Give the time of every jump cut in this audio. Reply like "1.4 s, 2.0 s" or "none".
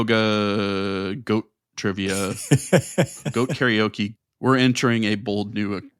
3.1 s, 4.1 s